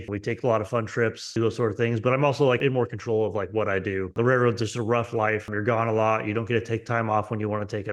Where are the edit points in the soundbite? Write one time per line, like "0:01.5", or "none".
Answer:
0:01.2

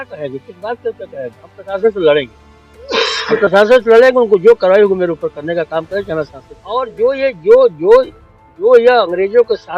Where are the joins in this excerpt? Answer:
0:06.9

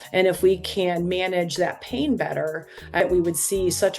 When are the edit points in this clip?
0:03.0

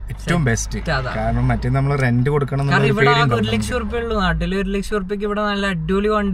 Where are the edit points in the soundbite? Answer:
none

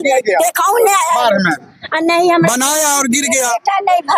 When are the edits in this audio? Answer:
none

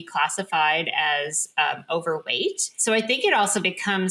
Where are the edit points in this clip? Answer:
0:02.7

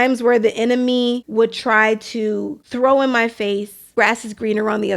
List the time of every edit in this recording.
0:01.2
0:02.6
0:03.9

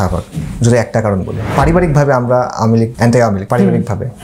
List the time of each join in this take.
0:01.4
0:03.2

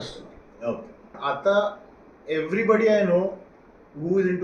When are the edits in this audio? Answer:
0:01.2

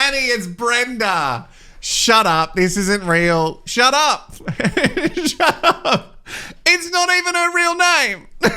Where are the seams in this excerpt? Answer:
none

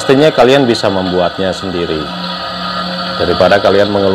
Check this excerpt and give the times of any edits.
none

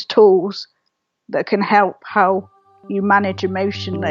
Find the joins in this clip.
none

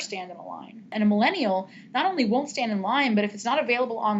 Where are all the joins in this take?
0:00.9

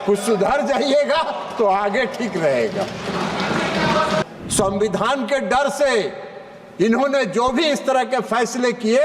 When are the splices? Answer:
0:04.2

